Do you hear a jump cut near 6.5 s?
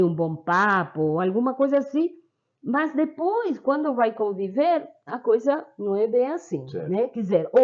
no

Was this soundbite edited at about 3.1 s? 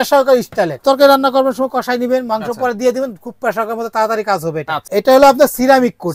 no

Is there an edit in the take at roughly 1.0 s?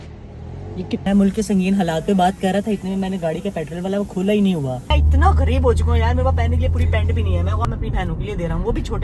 yes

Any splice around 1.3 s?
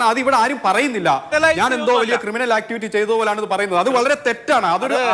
yes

